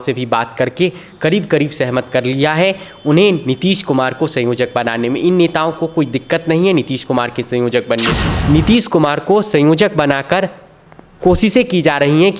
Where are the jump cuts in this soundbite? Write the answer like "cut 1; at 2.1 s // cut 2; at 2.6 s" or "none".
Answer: cut 1; at 8.3 s